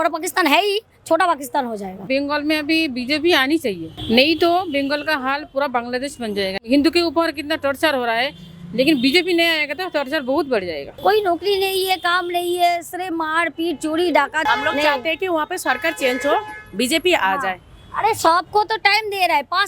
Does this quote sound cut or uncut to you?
cut